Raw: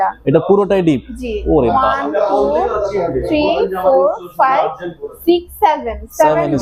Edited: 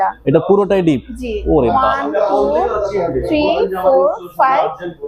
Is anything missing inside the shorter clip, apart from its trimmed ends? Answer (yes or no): no